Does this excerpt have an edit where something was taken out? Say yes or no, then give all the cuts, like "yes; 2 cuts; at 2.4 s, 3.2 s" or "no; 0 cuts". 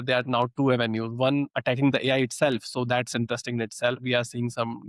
no; 0 cuts